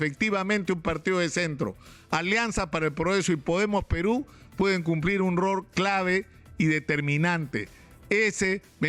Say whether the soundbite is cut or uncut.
uncut